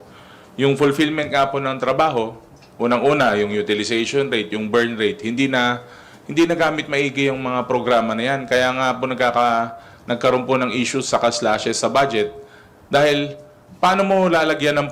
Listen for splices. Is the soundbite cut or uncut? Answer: uncut